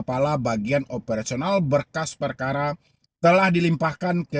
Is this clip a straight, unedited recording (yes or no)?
yes